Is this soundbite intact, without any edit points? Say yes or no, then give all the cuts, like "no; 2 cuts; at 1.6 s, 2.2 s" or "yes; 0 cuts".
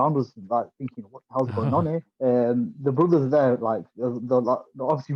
no; 1 cut; at 2.1 s